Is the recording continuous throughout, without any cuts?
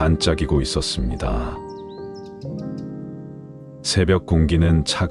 yes; 0 cuts

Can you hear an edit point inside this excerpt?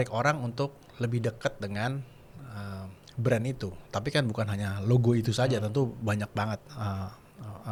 no; 0 cuts

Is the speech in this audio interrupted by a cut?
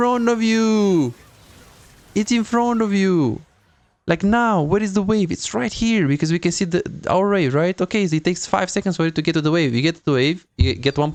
no; 0 cuts

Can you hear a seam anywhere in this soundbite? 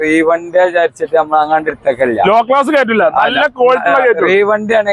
no; 0 cuts

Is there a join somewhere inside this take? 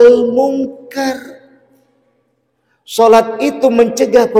no; 0 cuts

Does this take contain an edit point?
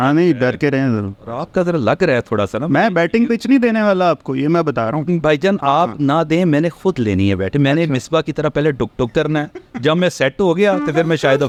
no; 0 cuts

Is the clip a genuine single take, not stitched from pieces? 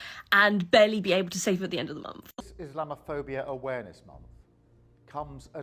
no; 1 cut; at 2.3 s

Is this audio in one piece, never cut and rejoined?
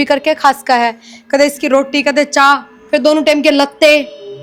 yes; 0 cuts

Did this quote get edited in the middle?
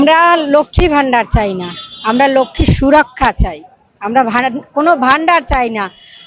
no; 0 cuts

